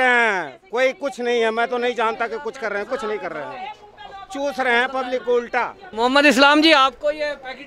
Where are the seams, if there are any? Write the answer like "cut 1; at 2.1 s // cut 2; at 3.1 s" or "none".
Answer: cut 1; at 5.9 s